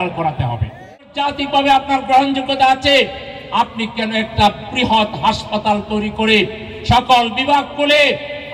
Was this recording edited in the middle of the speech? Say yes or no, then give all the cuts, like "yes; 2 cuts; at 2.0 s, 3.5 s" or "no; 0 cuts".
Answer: yes; 1 cut; at 0.9 s